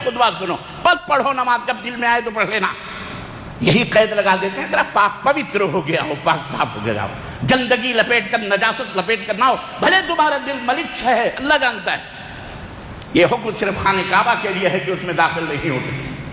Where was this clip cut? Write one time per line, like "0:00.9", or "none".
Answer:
none